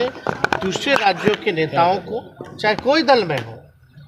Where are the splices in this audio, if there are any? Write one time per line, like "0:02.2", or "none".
none